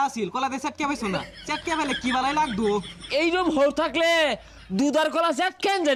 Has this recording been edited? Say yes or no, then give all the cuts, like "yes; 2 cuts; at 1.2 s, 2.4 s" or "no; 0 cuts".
no; 0 cuts